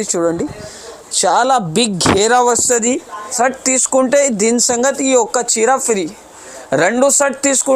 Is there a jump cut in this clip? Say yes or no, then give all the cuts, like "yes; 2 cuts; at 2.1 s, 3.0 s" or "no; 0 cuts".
yes; 1 cut; at 3.3 s